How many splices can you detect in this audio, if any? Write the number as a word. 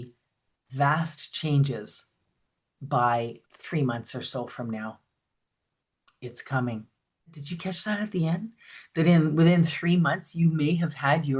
two